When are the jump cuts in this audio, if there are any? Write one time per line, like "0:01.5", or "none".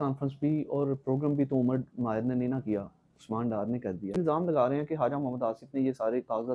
0:04.2